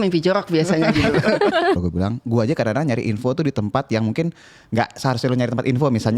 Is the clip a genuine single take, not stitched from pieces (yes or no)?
no